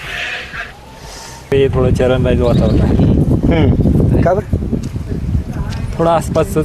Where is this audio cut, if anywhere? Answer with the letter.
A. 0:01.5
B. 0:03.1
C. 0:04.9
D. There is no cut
A